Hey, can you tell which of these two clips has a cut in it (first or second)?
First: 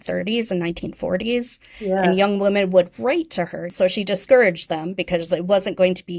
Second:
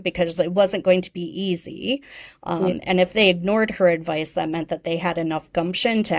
first